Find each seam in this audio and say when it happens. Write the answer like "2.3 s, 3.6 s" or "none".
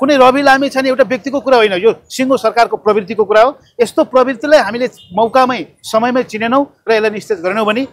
none